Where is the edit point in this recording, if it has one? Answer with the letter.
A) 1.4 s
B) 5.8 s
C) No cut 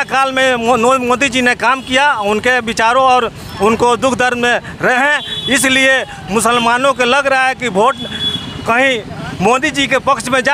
C